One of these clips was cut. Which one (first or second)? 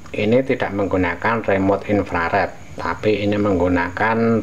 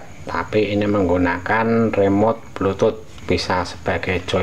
second